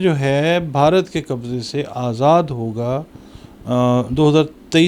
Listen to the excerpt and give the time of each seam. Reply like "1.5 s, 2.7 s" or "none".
none

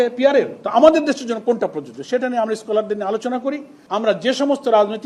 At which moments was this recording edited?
3.7 s

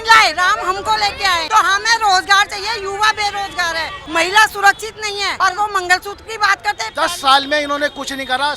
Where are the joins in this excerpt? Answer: 1.4 s, 4.0 s, 5.3 s, 6.9 s

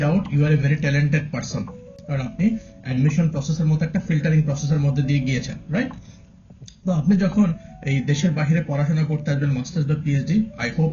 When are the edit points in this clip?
none

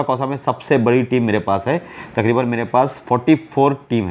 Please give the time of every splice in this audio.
none

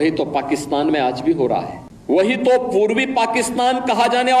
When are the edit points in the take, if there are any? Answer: 2.1 s

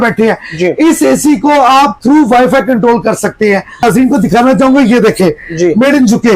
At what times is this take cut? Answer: 3.8 s

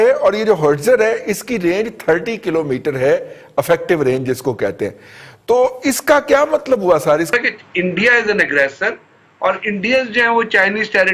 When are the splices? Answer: 7.3 s

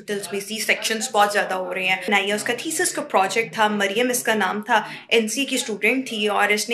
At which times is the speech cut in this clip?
2.1 s

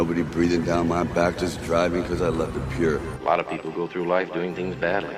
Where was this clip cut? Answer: none

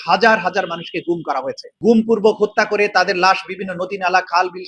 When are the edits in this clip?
1.6 s

